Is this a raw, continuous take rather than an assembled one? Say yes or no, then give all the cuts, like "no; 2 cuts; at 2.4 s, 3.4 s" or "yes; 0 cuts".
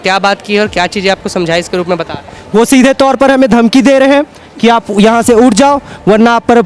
yes; 0 cuts